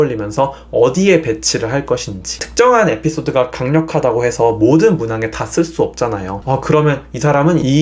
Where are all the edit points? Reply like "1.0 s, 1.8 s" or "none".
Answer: 6.3 s